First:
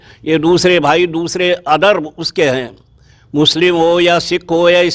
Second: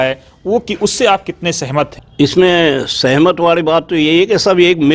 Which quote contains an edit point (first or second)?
second